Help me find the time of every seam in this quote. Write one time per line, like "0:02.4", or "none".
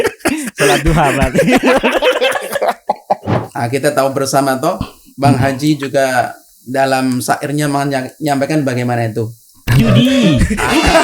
0:03.3